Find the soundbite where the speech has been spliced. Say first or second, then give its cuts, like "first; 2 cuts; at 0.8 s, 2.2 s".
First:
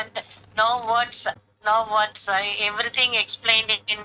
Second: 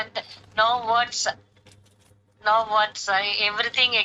first; 1 cut; at 1.5 s